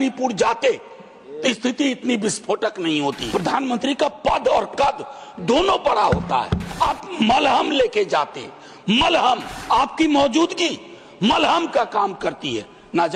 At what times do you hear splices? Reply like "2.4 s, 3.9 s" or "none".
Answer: 3.2 s, 6.6 s, 9.5 s